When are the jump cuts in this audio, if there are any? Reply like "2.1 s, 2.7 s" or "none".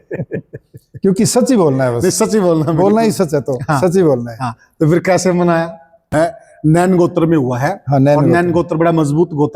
6.1 s